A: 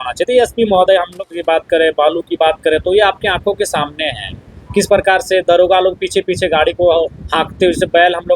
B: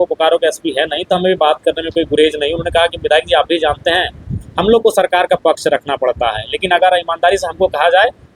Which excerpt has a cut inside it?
A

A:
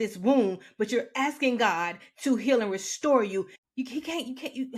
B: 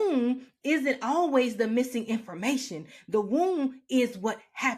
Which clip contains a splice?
A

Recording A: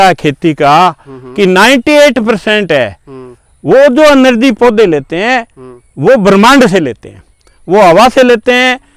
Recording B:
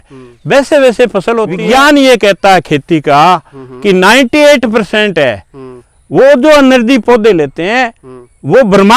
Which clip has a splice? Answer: B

